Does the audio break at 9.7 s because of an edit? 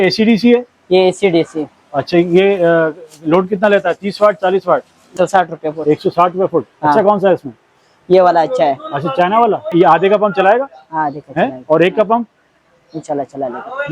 yes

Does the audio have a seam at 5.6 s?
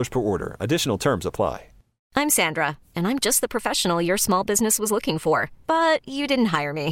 no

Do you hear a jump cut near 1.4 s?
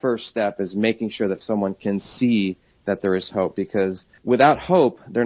no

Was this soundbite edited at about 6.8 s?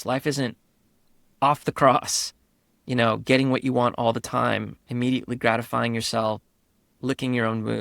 yes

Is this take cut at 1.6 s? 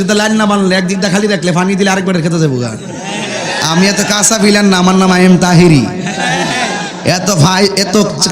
no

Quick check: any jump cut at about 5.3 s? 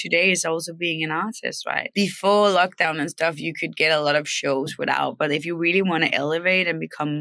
no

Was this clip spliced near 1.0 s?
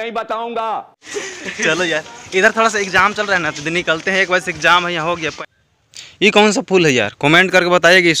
yes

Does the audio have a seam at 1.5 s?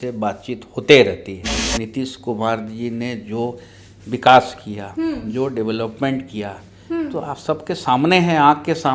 yes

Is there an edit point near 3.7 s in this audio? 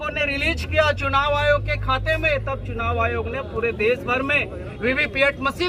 no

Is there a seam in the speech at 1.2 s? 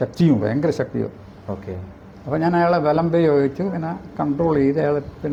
no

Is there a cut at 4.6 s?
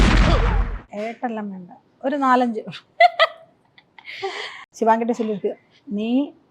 yes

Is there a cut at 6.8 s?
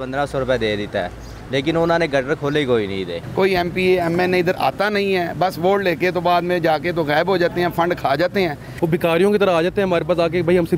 no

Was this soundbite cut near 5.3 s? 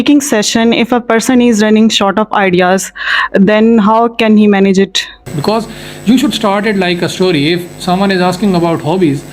yes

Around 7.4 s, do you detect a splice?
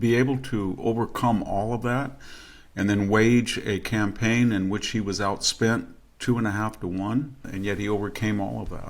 yes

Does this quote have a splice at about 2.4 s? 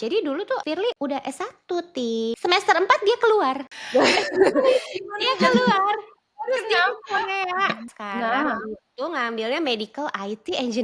yes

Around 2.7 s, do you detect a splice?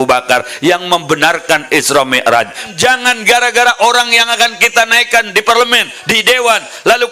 yes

